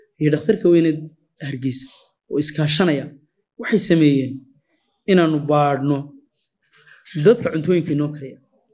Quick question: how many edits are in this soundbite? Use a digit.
0